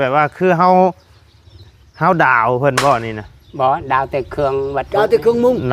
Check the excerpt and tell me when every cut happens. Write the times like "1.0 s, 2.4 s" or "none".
none